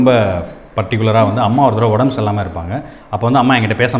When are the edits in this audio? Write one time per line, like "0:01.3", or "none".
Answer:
none